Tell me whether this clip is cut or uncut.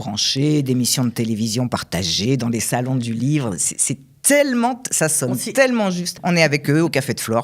cut